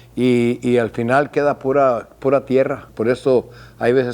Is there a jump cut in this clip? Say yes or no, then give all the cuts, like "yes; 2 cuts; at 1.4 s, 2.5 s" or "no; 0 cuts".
yes; 1 cut; at 3.0 s